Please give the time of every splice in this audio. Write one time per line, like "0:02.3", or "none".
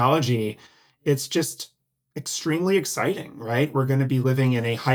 none

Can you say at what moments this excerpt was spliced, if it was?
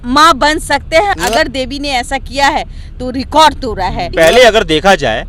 0:01.2
0:04.1

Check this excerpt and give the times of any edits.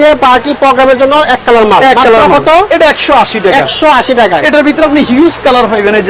none

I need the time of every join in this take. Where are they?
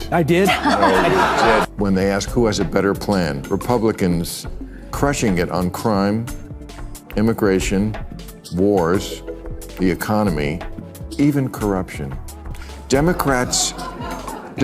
0:01.7

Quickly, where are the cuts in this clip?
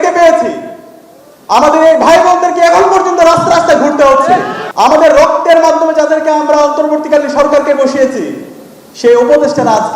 0:04.6

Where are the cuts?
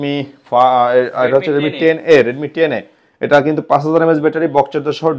none

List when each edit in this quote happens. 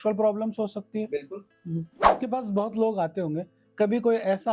0:02.0

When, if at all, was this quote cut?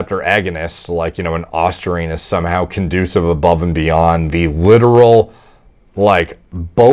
none

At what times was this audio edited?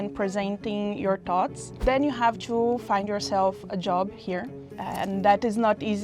0:01.8
0:04.7

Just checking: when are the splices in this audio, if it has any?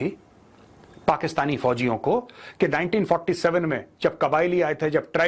none

